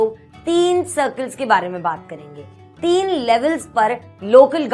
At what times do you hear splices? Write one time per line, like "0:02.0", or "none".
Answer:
none

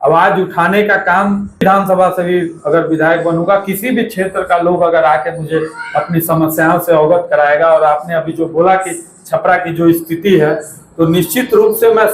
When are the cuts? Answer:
0:01.6

